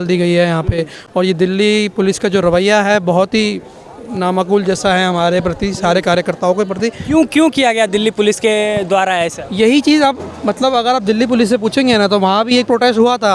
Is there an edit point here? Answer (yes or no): no